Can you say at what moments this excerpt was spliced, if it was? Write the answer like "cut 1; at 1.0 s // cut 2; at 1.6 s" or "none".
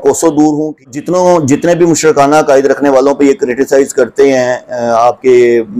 cut 1; at 0.9 s